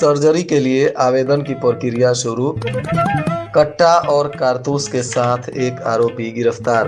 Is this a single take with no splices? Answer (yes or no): yes